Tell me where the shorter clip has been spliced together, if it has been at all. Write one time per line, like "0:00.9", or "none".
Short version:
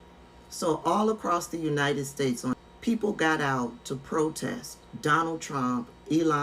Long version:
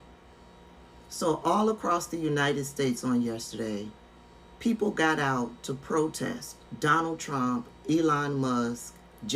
0:02.5